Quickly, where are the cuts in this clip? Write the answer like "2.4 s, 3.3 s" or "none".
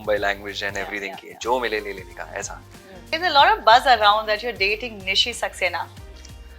3.1 s